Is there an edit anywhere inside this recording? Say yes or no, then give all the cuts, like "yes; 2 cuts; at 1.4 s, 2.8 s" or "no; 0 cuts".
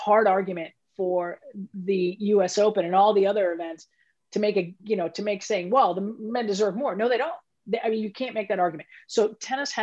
no; 0 cuts